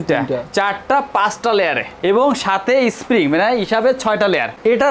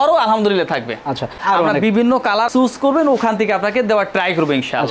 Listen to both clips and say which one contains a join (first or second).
second